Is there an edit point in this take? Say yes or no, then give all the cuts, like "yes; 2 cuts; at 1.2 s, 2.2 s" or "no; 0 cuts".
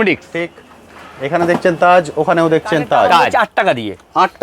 yes; 1 cut; at 3.3 s